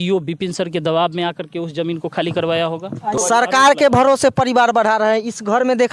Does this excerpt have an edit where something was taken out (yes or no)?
yes